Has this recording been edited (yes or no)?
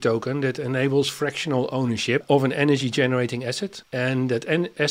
yes